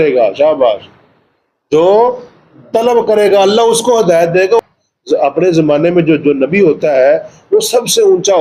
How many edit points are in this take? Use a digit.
1